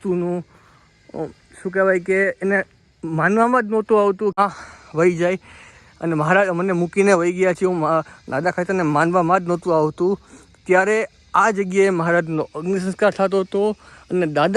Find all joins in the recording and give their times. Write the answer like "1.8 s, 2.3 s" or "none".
4.4 s